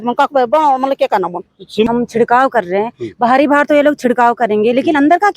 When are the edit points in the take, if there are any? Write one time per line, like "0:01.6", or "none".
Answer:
0:01.9